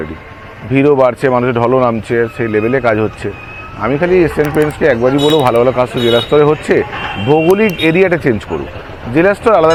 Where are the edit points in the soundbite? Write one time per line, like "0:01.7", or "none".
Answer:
none